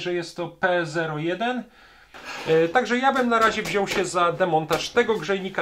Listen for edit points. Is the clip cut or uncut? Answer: cut